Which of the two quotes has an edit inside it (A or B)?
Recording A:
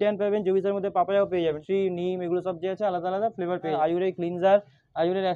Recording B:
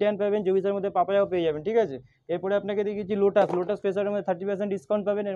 A